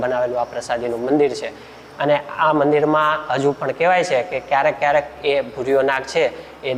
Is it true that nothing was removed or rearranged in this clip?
yes; 0 cuts

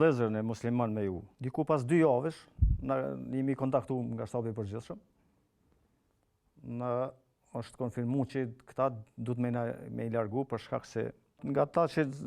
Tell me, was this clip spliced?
yes; 2 cuts; at 1.3 s, 11.3 s

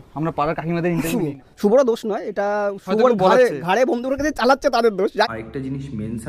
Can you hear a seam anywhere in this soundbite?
yes; 2 cuts; at 1.2 s, 5.2 s

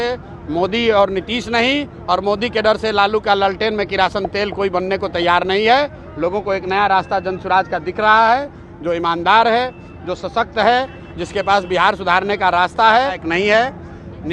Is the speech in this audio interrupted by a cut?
yes; 1 cut; at 13.2 s

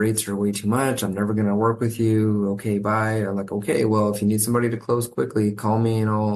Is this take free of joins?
yes; 0 cuts

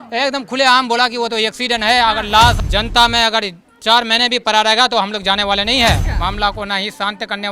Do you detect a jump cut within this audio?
yes; 2 cuts; at 2.6 s, 6.0 s

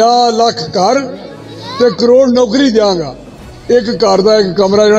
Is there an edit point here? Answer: no; 0 cuts

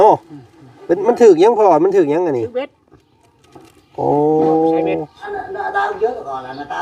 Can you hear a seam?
yes; 1 cut; at 5.2 s

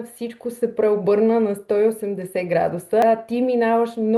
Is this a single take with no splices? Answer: no; 1 cut; at 3.0 s

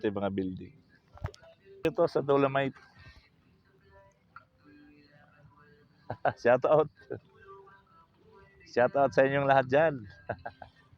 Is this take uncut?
no; 1 cut; at 1.8 s

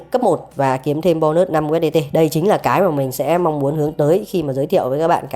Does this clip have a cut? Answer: no; 0 cuts

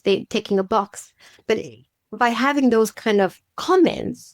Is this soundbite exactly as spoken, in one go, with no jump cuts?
no; 1 cut; at 2.9 s

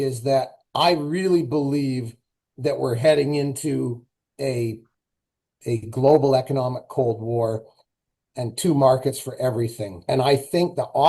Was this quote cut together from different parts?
yes; 1 cut; at 9.9 s

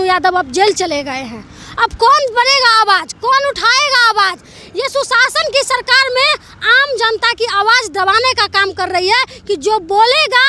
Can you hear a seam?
no; 0 cuts

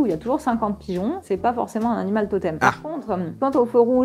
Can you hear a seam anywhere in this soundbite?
yes; 2 cuts; at 1.2 s, 2.8 s

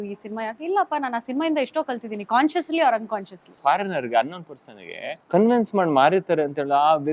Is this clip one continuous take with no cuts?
no; 2 cuts; at 3.6 s, 5.1 s

